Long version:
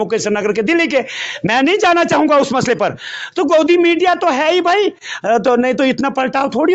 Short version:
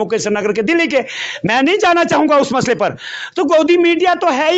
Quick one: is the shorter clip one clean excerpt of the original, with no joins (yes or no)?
yes